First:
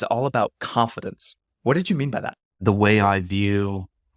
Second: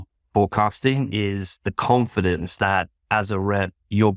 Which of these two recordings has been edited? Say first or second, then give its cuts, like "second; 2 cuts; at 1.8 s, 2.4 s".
first; 1 cut; at 2.5 s